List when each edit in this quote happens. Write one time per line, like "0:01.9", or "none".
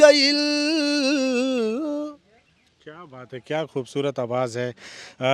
none